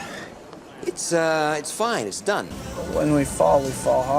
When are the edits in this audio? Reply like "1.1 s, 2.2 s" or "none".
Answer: 2.9 s

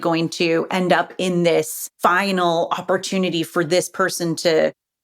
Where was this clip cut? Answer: 1.8 s

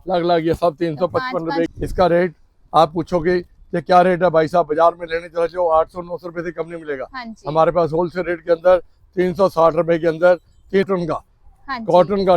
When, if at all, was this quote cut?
1.7 s, 10.9 s

